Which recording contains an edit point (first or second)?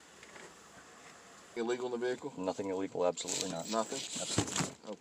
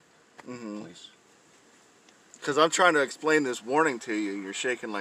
first